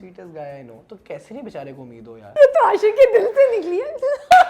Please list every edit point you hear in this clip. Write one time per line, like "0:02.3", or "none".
0:02.3